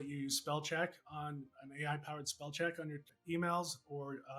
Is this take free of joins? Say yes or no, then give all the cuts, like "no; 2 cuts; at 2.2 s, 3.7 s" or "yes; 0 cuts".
no; 1 cut; at 3.1 s